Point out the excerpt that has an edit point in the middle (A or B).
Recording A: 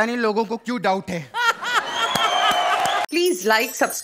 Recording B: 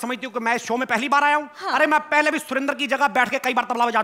A